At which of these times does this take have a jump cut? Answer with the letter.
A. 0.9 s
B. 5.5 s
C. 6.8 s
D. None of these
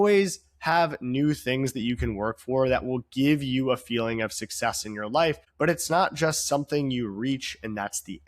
B